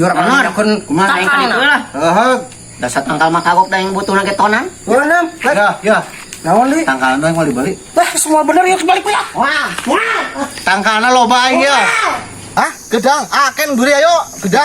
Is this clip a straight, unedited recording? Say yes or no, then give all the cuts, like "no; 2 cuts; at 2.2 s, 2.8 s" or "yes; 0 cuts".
no; 1 cut; at 12.7 s